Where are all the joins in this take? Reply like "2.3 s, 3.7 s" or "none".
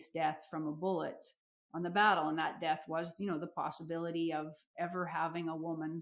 none